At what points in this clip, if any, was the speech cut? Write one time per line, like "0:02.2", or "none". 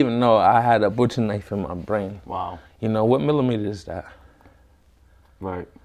none